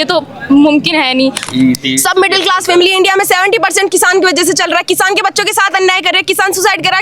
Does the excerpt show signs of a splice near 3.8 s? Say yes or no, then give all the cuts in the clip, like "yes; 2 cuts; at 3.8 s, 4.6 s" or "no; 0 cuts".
no; 1 cut; at 1.4 s